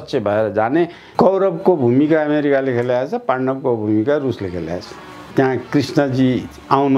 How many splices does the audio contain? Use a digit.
2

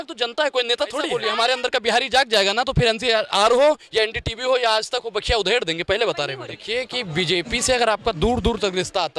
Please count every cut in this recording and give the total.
2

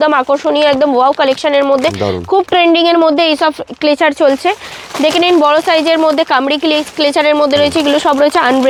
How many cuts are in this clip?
0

